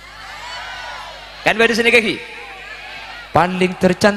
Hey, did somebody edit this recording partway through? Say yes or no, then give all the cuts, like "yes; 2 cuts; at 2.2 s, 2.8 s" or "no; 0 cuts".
no; 0 cuts